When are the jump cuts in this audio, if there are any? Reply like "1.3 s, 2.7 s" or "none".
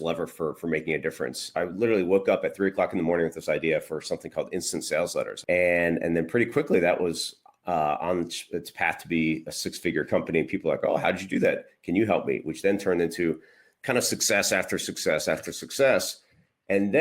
1.4 s, 5.3 s